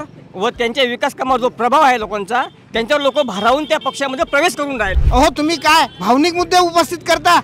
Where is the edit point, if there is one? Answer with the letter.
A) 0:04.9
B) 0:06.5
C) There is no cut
A